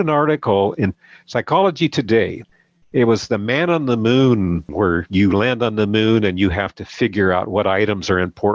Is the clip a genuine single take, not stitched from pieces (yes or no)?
no